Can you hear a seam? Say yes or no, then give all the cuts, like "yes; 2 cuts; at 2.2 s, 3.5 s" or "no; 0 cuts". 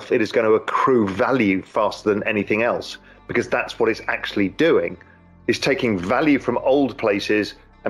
no; 0 cuts